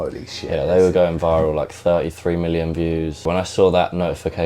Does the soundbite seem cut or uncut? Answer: cut